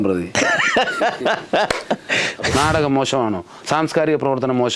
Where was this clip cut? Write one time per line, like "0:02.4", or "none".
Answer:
0:02.4